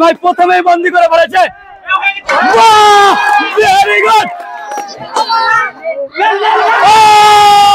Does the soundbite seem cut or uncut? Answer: uncut